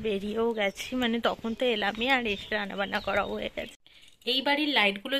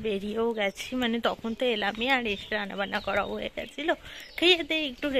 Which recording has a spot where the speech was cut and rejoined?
first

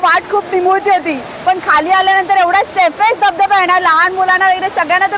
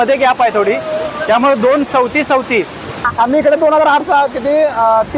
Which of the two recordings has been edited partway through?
second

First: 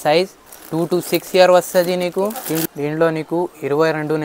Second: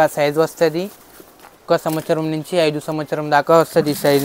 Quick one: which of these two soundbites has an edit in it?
first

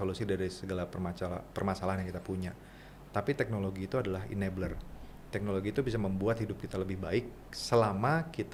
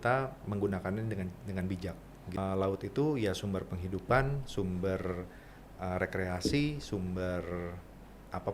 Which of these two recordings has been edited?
second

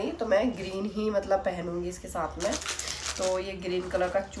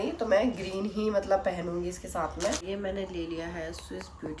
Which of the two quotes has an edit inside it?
second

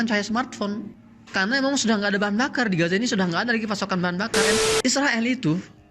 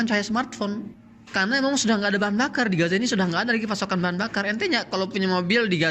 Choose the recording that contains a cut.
first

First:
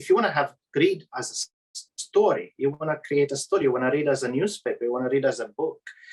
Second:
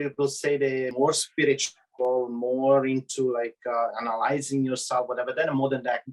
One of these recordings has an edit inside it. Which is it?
second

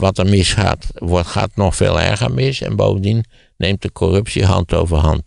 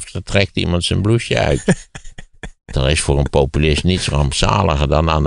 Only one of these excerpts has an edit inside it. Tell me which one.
second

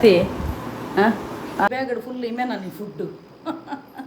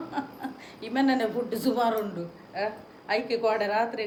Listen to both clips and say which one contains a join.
first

